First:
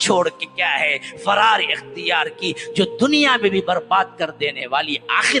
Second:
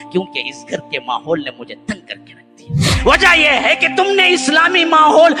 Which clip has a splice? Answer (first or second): second